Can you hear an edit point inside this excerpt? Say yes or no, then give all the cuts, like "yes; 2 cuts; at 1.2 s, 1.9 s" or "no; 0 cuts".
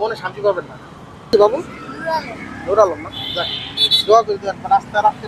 yes; 1 cut; at 1.3 s